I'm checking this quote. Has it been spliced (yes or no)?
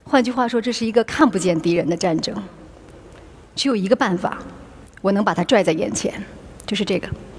yes